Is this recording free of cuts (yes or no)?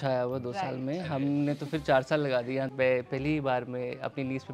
no